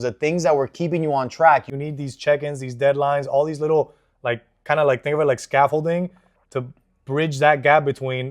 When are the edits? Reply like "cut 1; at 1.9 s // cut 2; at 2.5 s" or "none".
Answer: cut 1; at 1.7 s